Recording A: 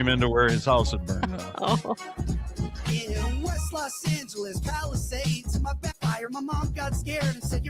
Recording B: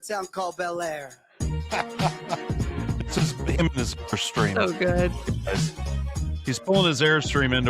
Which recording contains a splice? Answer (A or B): A